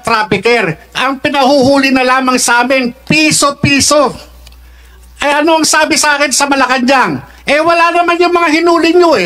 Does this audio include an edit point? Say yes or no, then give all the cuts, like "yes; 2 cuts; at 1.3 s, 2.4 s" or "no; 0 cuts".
no; 0 cuts